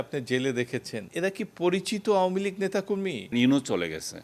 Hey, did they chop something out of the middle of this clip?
yes; 2 cuts; at 1.0 s, 3.3 s

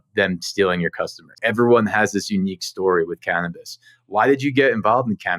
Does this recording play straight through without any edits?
no; 1 cut; at 1.4 s

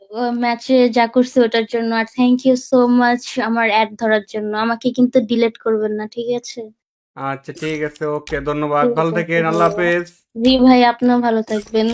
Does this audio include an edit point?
no; 0 cuts

